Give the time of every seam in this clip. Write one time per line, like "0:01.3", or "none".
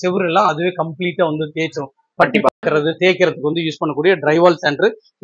none